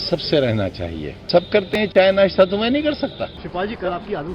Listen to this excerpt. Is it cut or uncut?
cut